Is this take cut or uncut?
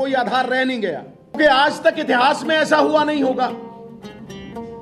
cut